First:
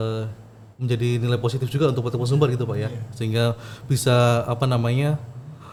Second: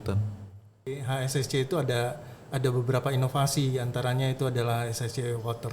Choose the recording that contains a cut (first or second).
second